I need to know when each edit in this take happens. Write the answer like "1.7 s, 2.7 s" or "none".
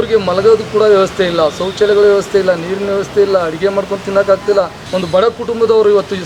4.8 s